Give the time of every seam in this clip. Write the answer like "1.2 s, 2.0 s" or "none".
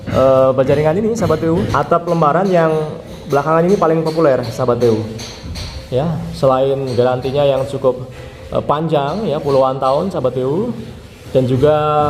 1.7 s